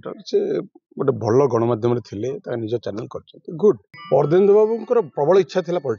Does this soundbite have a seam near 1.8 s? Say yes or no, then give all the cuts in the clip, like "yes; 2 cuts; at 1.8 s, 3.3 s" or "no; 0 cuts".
no; 1 cut; at 3.9 s